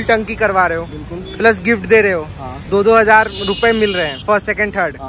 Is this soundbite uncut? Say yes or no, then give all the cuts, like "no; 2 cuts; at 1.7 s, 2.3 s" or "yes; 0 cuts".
no; 1 cut; at 1.3 s